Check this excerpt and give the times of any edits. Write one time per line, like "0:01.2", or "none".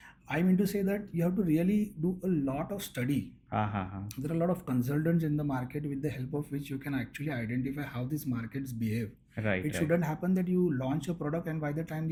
none